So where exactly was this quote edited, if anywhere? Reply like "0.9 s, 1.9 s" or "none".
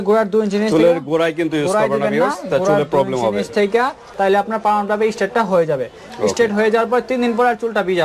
4.0 s